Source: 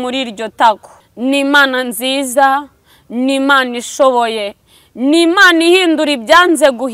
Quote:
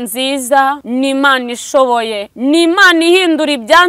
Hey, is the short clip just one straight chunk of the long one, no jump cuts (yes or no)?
no